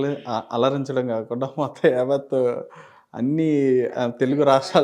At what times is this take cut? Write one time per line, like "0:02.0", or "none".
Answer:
none